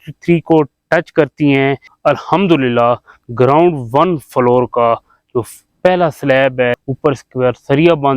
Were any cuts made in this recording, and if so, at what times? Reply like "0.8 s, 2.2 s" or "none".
1.9 s, 6.7 s